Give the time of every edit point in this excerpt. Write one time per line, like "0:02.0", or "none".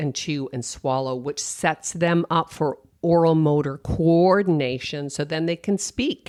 none